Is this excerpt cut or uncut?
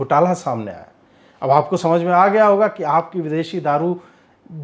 uncut